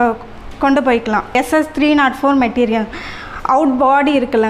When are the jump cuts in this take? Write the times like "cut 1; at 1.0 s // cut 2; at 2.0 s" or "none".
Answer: cut 1; at 1.4 s